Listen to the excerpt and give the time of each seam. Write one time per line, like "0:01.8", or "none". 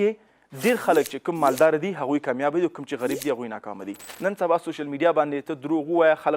0:04.1